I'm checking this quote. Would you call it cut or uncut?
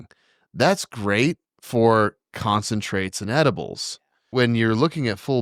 cut